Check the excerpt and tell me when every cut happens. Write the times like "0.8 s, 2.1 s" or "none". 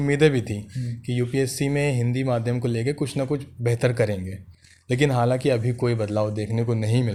none